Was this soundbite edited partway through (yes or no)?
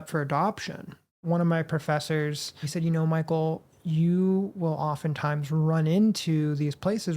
yes